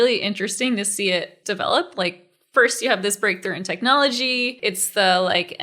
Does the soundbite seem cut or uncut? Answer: cut